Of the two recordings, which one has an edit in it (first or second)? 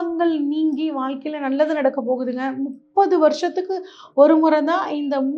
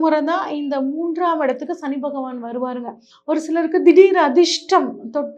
second